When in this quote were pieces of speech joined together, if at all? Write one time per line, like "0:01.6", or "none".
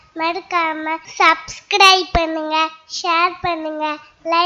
0:01.1